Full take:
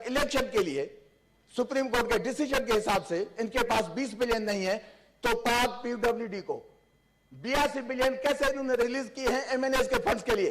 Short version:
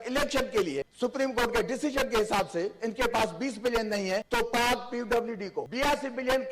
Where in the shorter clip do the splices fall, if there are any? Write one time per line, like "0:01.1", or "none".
0:00.9
0:04.3
0:05.6